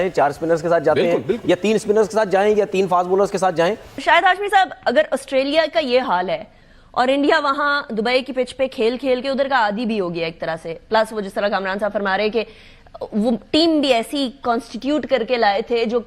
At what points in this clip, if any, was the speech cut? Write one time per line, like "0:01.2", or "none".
0:03.9